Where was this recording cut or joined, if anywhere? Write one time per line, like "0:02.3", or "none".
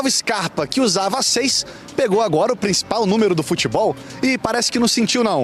none